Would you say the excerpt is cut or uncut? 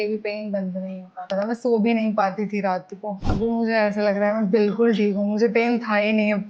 cut